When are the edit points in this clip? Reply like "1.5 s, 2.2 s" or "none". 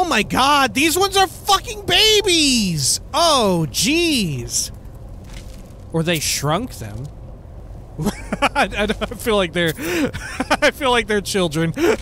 none